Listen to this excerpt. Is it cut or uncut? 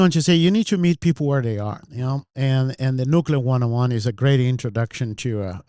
uncut